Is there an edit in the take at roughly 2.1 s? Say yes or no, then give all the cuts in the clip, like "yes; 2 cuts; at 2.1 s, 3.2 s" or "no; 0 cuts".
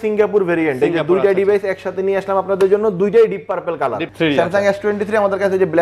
no; 1 cut; at 4.0 s